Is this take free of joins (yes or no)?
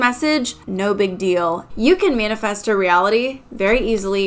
no